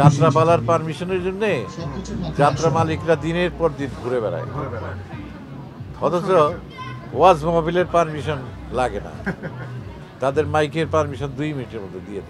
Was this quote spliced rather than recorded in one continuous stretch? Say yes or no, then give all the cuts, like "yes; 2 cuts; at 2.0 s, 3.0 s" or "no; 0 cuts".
no; 0 cuts